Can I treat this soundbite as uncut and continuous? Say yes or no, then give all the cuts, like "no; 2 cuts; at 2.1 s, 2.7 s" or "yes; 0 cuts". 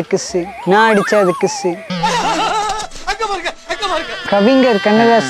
no; 1 cut; at 4.2 s